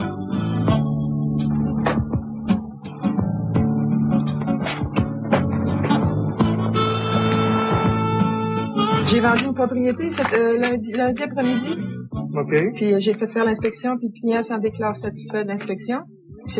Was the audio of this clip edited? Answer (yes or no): yes